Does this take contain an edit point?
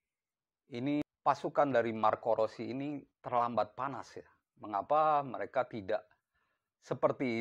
yes; 1 cut; at 1.1 s

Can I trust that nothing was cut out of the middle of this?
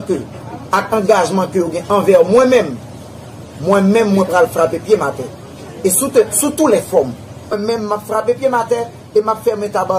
no; 1 cut; at 7.6 s

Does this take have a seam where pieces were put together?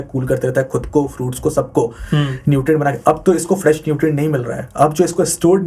no; 0 cuts

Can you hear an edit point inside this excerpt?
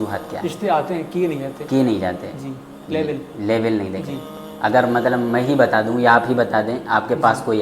no; 0 cuts

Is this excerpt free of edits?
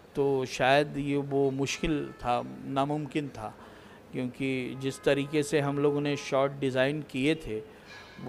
yes; 0 cuts

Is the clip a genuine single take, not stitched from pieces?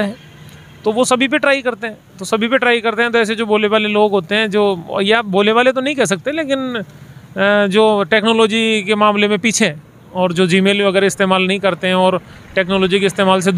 yes; 0 cuts

